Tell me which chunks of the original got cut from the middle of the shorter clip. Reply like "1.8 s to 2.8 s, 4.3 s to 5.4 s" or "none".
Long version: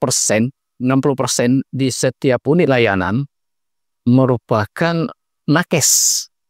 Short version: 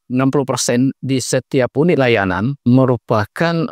3.2 s to 3.9 s